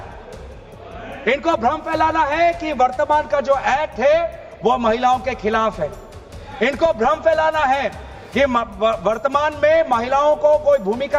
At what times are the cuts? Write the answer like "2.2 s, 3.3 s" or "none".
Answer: none